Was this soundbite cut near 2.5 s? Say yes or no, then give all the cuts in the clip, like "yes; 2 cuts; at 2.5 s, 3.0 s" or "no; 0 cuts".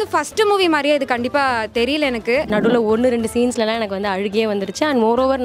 yes; 1 cut; at 2.5 s